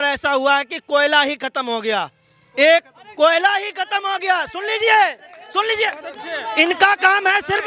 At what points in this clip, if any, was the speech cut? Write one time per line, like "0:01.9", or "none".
none